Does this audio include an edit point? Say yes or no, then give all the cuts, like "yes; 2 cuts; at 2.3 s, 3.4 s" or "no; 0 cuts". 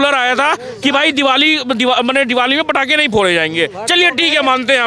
no; 0 cuts